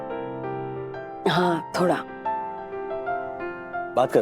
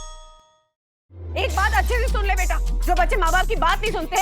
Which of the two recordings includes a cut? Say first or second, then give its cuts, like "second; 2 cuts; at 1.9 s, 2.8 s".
second; 1 cut; at 1.1 s